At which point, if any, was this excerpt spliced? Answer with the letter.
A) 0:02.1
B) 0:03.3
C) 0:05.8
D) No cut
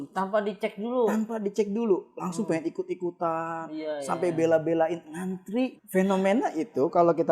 C